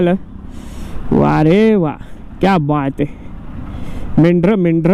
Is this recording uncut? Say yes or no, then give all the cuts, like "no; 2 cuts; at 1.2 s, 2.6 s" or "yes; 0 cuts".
yes; 0 cuts